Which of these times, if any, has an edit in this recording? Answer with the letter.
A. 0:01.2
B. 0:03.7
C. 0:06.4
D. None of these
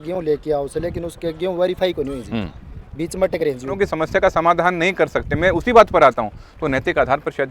B